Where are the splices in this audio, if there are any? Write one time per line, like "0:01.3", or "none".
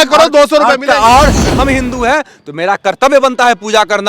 0:01.4